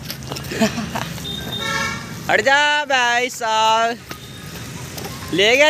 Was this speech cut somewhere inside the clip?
no; 0 cuts

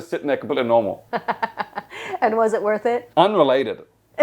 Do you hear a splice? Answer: yes; 2 cuts; at 1.0 s, 3.0 s

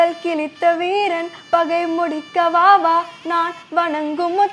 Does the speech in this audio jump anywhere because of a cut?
no; 0 cuts

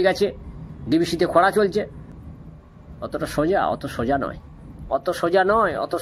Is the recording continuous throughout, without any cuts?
no; 1 cut; at 2.1 s

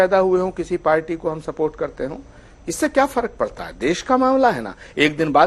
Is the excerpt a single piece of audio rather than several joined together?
yes; 0 cuts

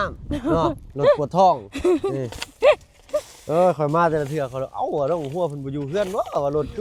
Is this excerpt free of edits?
yes; 0 cuts

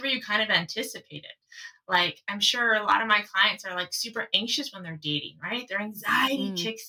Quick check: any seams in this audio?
no; 0 cuts

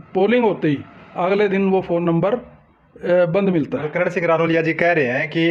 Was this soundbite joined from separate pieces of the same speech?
no; 0 cuts

